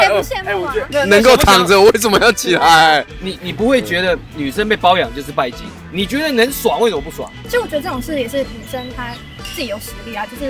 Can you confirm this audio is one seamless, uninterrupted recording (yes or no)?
yes